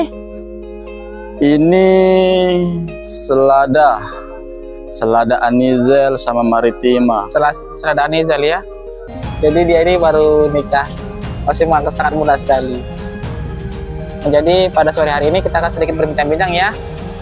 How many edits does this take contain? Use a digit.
1